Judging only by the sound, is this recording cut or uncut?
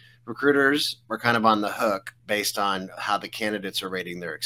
cut